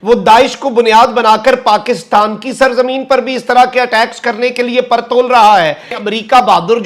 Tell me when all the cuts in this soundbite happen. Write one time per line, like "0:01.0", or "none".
0:05.9